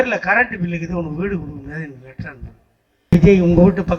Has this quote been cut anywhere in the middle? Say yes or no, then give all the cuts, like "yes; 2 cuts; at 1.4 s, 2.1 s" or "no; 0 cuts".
yes; 1 cut; at 3.1 s